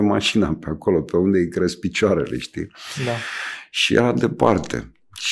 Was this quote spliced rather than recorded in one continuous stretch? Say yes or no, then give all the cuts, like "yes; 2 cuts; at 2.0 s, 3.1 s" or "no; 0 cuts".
no; 0 cuts